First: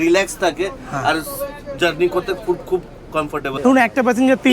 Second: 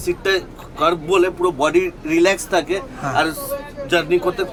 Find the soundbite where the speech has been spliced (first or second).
first